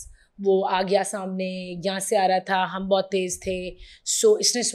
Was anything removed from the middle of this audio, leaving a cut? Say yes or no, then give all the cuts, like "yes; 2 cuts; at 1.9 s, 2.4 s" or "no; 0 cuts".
no; 0 cuts